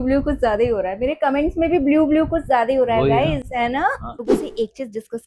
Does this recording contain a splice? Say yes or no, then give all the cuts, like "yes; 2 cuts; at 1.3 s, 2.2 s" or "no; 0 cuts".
no; 0 cuts